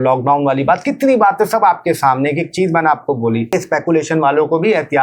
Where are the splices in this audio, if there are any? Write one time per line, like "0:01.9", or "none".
0:03.5